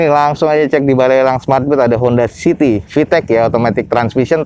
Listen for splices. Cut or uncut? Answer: uncut